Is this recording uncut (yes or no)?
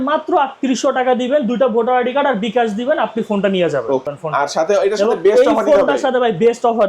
no